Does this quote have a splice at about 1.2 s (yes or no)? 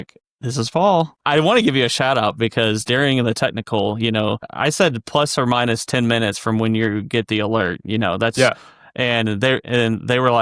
yes